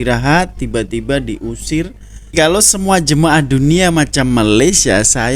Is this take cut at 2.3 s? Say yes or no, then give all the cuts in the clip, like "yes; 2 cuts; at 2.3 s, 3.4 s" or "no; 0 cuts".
yes; 1 cut; at 2.3 s